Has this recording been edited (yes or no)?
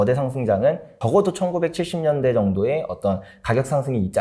no